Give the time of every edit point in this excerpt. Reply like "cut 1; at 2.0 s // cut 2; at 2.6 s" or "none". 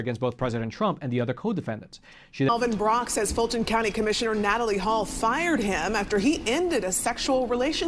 cut 1; at 2.5 s